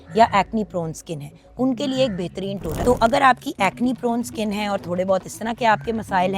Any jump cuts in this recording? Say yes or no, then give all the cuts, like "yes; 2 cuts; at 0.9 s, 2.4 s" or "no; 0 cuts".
yes; 1 cut; at 2.7 s